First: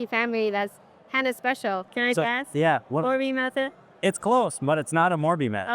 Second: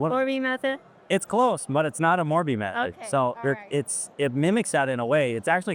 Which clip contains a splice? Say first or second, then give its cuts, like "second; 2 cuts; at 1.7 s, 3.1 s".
first; 1 cut; at 1.9 s